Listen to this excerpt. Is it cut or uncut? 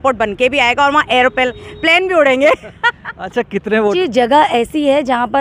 cut